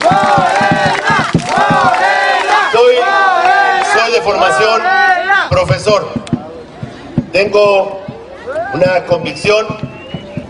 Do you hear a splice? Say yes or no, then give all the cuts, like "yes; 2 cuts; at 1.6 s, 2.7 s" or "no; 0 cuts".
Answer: yes; 1 cut; at 5.1 s